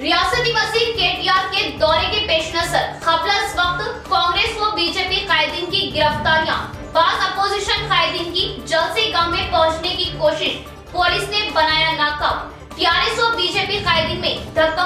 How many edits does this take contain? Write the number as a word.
zero